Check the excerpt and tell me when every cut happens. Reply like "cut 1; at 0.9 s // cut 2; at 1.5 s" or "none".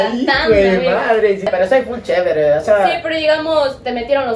cut 1; at 1.5 s